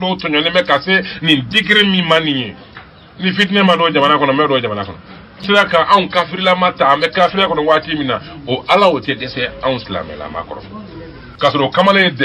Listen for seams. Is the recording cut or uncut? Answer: cut